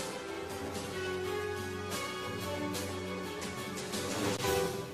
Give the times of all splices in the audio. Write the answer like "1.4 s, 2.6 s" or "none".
none